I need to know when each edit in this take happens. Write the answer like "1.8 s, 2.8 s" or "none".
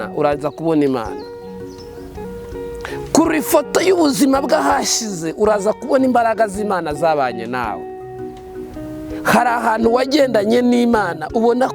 none